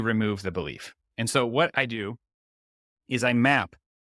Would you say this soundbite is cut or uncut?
uncut